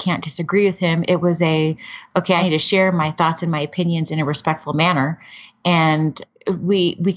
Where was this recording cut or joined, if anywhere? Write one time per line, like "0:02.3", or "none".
0:02.4